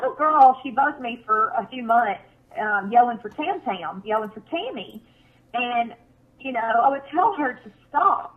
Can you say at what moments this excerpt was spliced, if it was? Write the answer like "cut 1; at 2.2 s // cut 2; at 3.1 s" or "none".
cut 1; at 4.9 s